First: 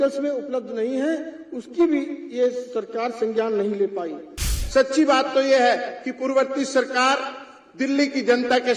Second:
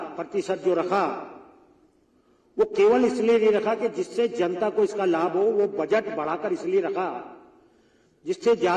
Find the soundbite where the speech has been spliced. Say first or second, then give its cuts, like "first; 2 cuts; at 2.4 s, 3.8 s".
first; 1 cut; at 4.5 s